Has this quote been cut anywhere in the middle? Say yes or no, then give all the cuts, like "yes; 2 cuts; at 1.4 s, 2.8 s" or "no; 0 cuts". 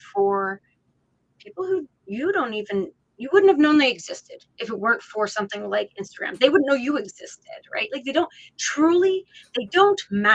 no; 0 cuts